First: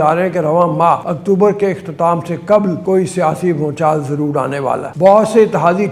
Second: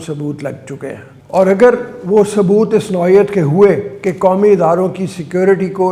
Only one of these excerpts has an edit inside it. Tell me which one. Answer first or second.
first